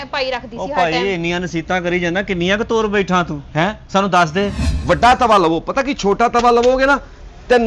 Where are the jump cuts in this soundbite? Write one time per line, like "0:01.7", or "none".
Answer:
0:04.6